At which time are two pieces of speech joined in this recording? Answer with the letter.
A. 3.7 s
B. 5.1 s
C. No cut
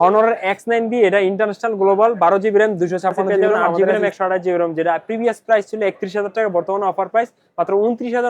A